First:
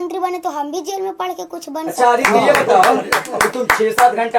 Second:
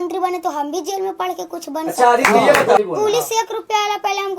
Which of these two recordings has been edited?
second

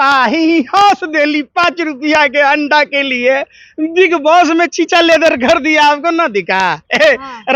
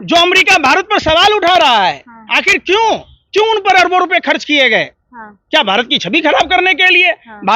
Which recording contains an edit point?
second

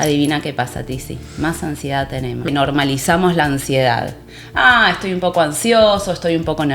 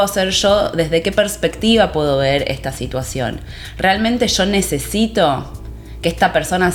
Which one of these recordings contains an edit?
first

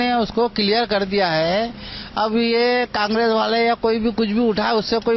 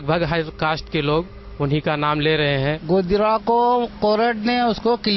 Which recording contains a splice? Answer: second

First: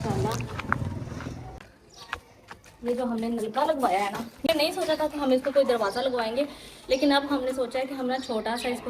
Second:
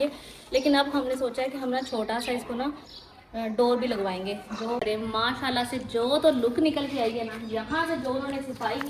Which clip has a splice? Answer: first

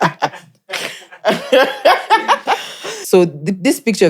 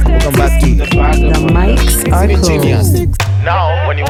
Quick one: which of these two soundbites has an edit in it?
first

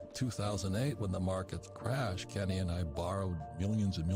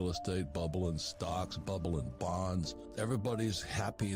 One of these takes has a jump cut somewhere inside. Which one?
second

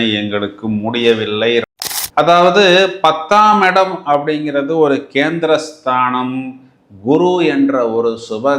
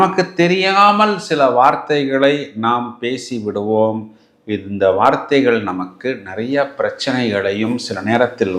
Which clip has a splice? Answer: first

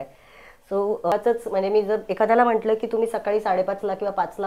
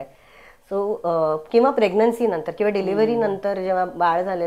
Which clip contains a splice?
first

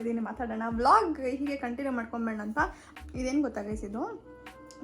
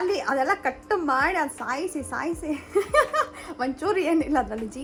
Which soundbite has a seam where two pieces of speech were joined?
first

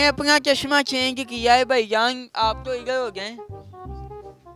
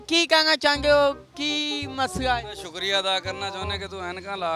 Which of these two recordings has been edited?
first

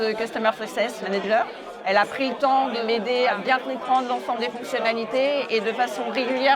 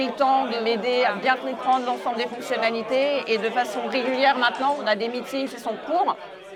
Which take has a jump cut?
first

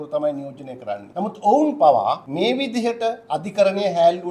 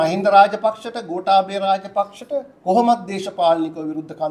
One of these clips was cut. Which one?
first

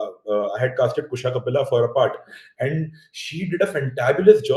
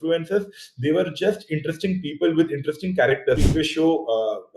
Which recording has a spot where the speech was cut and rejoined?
second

